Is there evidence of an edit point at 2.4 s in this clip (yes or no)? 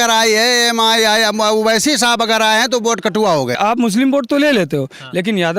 no